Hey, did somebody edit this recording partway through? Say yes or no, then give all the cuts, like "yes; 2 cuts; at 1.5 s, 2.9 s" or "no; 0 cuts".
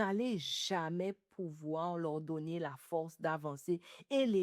no; 0 cuts